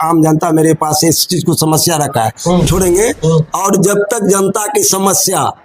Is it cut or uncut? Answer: cut